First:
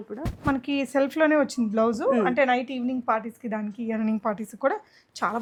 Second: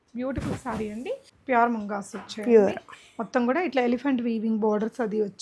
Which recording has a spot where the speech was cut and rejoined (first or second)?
second